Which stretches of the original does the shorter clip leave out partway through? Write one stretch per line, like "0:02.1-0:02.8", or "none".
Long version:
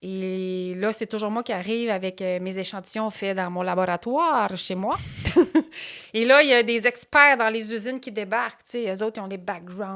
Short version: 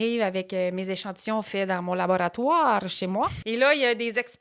0:05.1-0:06.1